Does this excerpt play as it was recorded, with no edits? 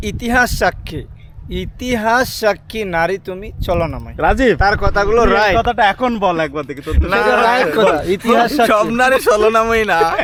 yes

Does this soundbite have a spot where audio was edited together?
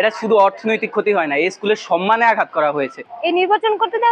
yes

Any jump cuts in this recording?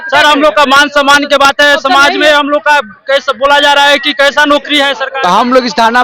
yes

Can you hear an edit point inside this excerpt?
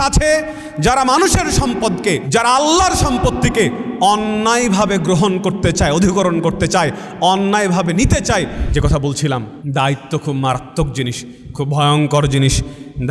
yes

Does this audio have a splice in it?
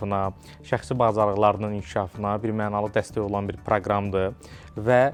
no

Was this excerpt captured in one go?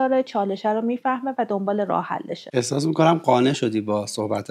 no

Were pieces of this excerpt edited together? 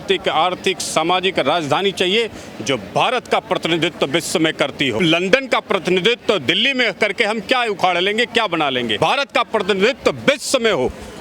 yes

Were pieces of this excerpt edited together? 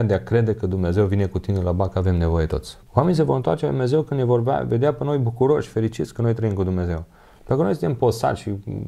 yes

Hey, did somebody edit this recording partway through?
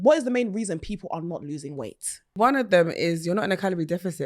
yes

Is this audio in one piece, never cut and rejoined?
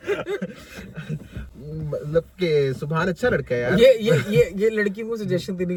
yes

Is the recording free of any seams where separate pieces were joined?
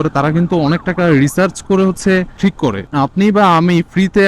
no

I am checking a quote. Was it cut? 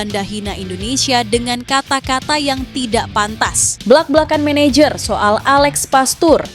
yes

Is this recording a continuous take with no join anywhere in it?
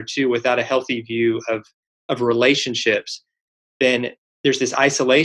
yes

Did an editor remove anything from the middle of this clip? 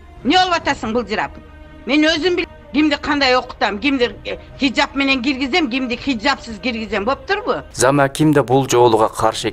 yes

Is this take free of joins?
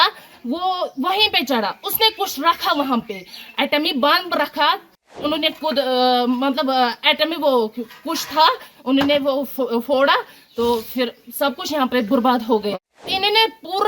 no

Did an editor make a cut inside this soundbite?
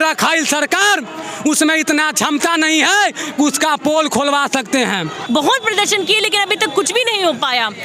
yes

